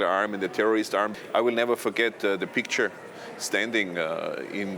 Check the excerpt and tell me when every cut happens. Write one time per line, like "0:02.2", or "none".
0:01.2